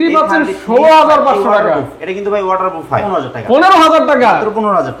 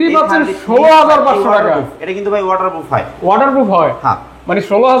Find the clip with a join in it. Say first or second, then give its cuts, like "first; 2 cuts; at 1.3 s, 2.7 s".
first; 1 cut; at 3.1 s